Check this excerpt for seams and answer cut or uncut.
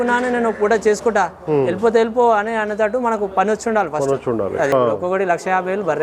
cut